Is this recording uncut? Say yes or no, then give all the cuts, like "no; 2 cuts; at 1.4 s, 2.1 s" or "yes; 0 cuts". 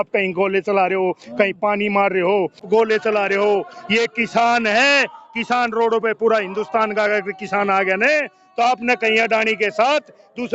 no; 1 cut; at 2.6 s